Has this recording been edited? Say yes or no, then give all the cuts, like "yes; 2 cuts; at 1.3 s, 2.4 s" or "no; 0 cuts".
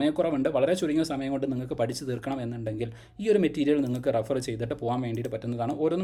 no; 0 cuts